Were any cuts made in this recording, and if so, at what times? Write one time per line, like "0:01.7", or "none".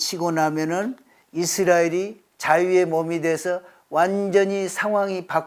none